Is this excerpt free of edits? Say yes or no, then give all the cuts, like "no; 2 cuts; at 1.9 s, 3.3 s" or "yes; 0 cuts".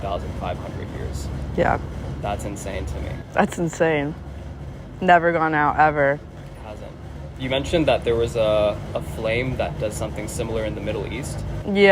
yes; 0 cuts